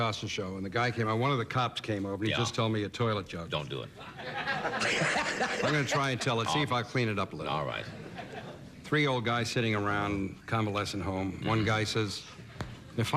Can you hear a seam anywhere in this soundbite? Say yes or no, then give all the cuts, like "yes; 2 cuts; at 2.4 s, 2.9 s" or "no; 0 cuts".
no; 0 cuts